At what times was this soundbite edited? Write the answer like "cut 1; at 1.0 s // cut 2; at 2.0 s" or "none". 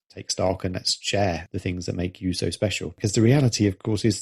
cut 1; at 1.5 s // cut 2; at 3.0 s